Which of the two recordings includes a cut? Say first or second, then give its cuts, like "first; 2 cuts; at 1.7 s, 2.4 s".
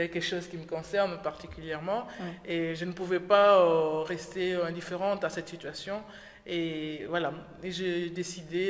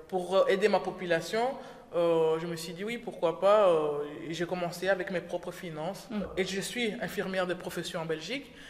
second; 1 cut; at 6.3 s